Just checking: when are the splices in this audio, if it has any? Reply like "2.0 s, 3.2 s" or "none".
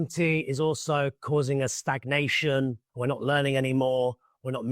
2.8 s